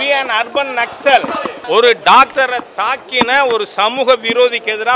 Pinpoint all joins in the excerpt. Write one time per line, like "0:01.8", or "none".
0:01.5